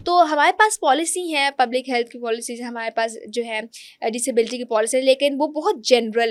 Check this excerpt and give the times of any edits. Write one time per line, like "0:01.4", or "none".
none